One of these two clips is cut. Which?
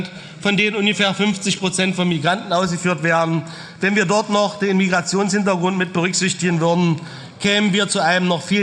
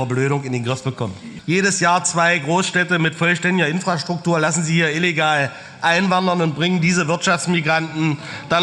second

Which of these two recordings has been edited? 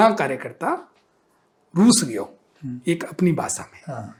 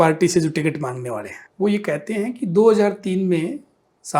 second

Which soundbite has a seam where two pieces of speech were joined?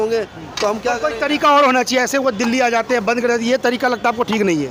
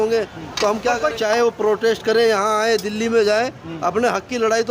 second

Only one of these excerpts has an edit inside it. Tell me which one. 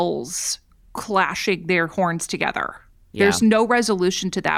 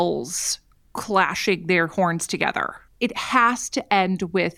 second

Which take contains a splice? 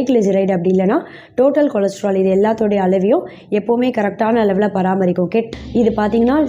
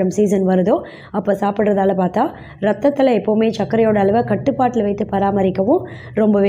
first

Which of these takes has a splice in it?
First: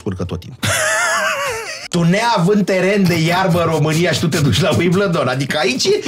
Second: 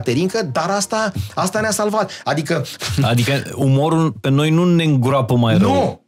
first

